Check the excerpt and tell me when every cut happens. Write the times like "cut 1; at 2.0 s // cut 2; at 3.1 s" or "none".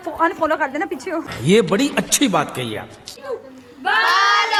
none